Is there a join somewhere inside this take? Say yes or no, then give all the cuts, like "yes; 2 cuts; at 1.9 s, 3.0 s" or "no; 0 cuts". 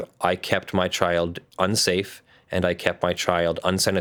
no; 0 cuts